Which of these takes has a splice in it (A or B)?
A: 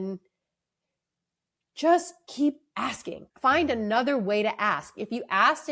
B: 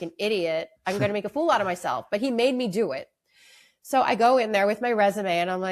A